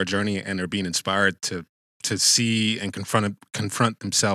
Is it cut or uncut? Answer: uncut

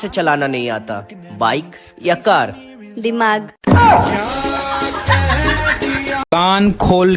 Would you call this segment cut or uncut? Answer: cut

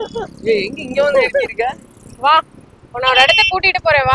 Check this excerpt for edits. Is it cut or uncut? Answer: uncut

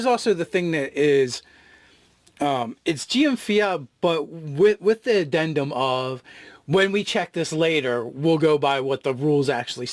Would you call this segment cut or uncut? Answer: cut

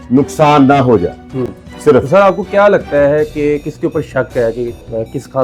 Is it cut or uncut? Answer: uncut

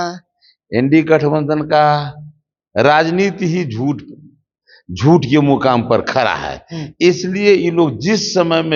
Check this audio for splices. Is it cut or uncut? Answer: uncut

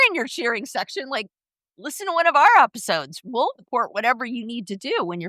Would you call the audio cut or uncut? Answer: cut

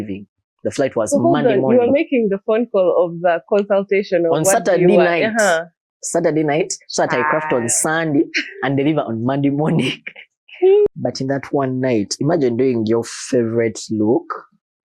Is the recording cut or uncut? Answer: cut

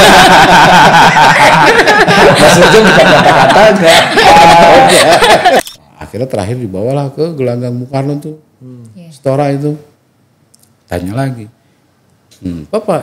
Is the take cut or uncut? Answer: cut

